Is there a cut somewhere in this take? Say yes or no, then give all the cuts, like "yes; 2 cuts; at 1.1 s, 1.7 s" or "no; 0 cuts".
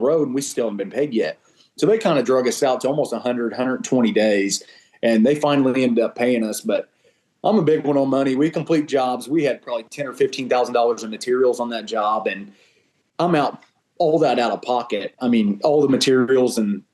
no; 0 cuts